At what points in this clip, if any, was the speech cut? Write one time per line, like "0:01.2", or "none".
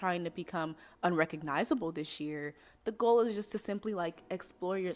none